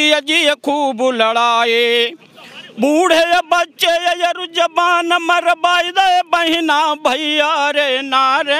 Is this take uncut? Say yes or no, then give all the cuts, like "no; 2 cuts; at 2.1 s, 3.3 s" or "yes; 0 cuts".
yes; 0 cuts